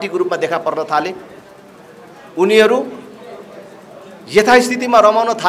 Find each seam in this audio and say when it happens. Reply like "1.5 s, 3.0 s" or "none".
none

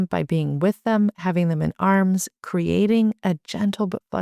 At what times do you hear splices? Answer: none

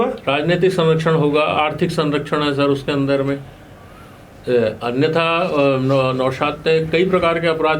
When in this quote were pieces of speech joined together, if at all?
none

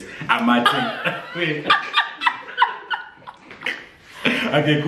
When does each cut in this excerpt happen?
none

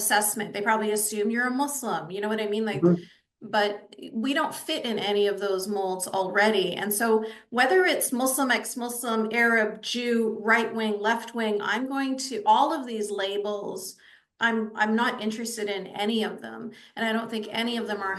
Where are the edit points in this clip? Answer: none

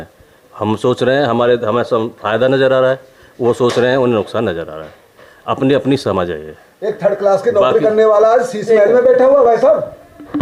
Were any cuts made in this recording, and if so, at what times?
none

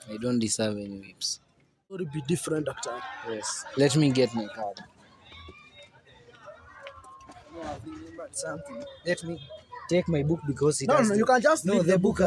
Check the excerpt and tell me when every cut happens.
2.0 s

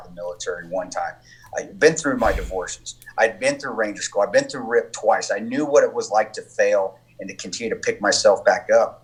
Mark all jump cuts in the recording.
none

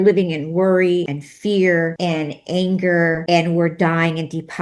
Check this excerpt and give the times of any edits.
1.2 s, 2.0 s, 3.2 s

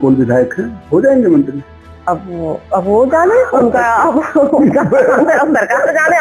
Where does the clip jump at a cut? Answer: none

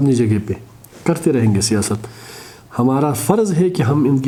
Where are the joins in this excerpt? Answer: none

